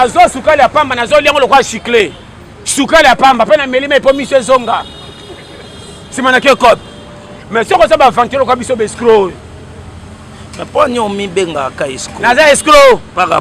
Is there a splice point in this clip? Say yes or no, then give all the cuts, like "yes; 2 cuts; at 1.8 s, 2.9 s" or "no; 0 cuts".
yes; 1 cut; at 7.3 s